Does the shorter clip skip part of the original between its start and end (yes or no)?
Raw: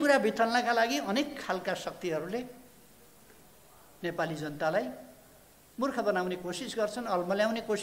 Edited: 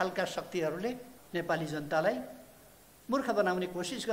yes